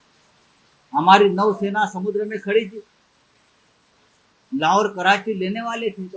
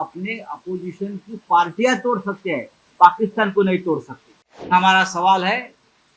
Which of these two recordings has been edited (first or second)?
second